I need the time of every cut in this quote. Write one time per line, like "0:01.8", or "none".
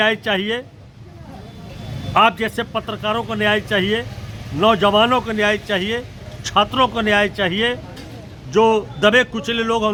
none